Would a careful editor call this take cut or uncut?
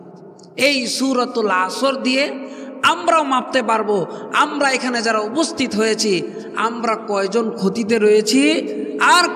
uncut